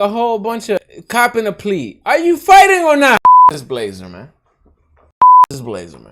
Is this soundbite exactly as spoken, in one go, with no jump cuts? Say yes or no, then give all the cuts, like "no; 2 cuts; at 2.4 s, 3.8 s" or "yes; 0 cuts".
no; 2 cuts; at 0.8 s, 3.6 s